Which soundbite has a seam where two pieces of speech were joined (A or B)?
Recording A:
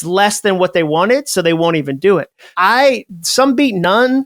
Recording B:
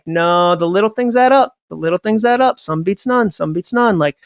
A